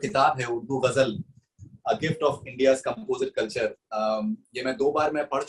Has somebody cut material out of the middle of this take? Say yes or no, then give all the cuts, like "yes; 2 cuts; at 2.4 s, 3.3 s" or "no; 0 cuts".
no; 0 cuts